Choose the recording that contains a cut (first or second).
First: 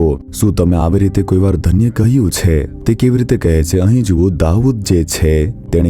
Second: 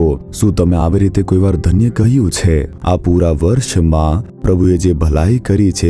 second